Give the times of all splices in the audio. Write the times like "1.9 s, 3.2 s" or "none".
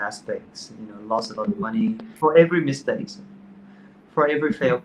2.1 s